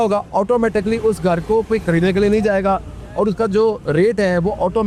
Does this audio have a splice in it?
no; 0 cuts

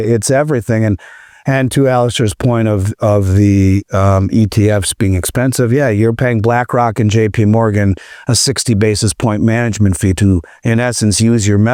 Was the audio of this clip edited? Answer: no; 0 cuts

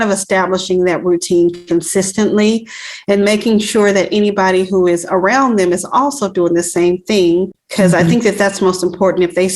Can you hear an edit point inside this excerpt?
yes; 1 cut; at 7.6 s

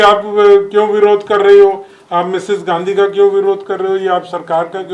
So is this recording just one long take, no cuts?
yes; 0 cuts

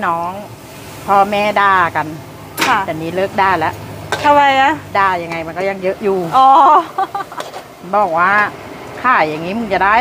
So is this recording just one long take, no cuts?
yes; 0 cuts

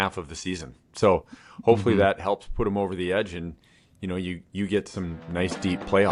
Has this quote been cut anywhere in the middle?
no; 0 cuts

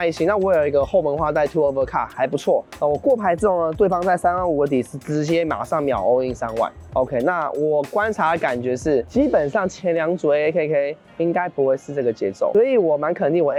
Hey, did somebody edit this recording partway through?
no; 0 cuts

